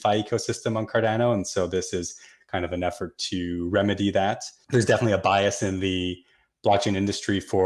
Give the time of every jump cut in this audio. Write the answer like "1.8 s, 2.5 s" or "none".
4.5 s